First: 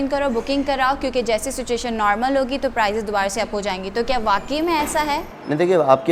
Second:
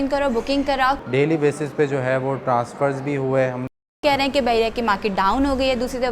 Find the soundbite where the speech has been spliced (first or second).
second